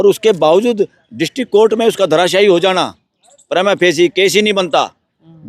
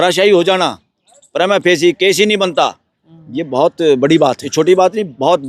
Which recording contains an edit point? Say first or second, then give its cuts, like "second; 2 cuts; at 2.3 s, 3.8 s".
second; 1 cut; at 4.4 s